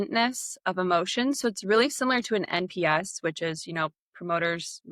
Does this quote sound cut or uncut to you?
uncut